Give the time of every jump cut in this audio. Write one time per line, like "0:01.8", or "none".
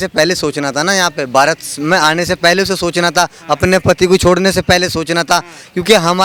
none